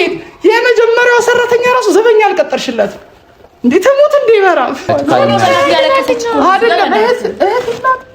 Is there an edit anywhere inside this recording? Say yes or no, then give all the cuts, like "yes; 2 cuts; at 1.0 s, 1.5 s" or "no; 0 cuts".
yes; 1 cut; at 4.9 s